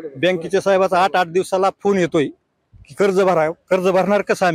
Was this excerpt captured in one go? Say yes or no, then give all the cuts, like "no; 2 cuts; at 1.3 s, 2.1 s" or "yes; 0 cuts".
yes; 0 cuts